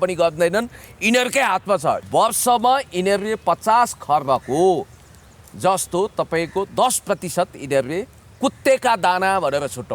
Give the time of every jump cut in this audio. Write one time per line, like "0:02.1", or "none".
0:02.0